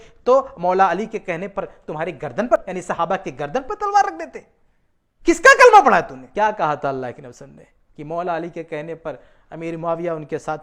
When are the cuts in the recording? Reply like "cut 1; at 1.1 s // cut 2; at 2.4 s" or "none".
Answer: cut 1; at 2.5 s // cut 2; at 6.2 s

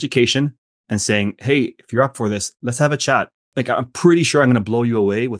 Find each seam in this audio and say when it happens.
cut 1; at 3.4 s

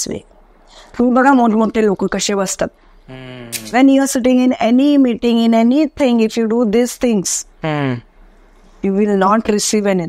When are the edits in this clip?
cut 1; at 3.5 s

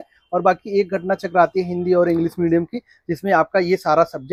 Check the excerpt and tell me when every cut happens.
none

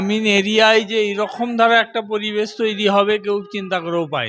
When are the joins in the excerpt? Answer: none

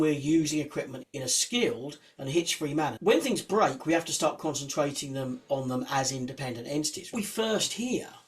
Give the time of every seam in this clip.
cut 1; at 1.0 s // cut 2; at 2.9 s // cut 3; at 7.1 s

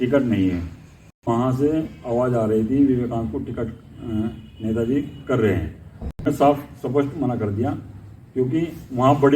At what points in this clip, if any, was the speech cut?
cut 1; at 1.3 s // cut 2; at 6.3 s

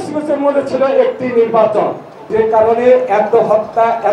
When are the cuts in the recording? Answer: cut 1; at 2.3 s

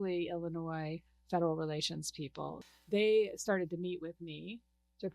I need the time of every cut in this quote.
cut 1; at 2.6 s

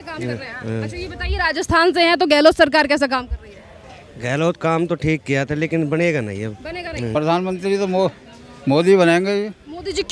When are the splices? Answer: cut 1; at 7.1 s

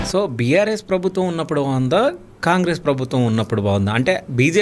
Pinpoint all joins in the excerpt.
none

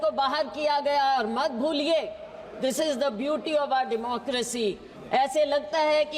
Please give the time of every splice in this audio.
cut 1; at 4.9 s

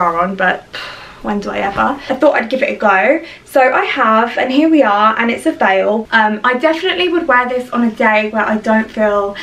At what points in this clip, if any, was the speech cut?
cut 1; at 2.0 s // cut 2; at 6.0 s

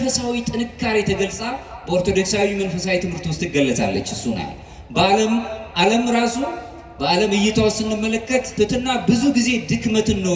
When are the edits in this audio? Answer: cut 1; at 8.5 s

